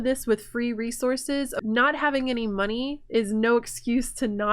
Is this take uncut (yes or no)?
no